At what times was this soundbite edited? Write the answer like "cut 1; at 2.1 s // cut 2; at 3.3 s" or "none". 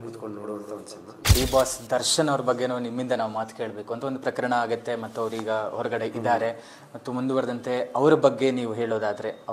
cut 1; at 1.3 s